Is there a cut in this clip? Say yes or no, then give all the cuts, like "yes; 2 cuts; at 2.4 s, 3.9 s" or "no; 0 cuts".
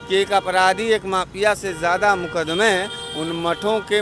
no; 0 cuts